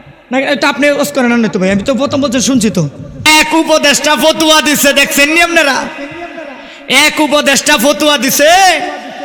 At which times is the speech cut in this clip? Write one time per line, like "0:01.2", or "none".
0:03.2